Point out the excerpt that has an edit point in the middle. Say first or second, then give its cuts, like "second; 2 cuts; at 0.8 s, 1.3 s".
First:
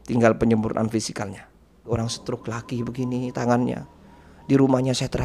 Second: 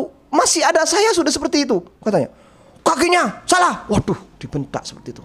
first; 1 cut; at 1.9 s